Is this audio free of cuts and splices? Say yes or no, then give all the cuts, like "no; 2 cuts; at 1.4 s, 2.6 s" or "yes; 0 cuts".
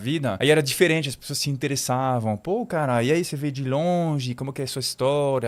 yes; 0 cuts